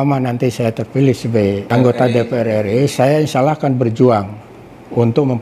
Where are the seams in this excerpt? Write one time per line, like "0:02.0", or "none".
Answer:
0:01.7